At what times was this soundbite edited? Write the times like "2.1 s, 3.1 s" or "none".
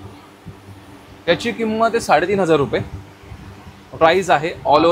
none

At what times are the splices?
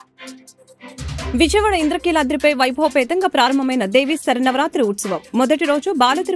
1.3 s

